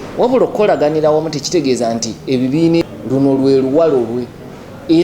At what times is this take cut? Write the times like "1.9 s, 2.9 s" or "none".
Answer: 2.8 s